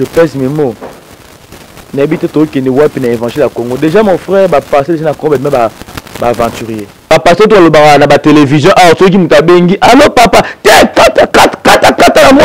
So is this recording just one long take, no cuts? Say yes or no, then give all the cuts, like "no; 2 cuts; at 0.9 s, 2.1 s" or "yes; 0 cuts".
no; 1 cut; at 6.9 s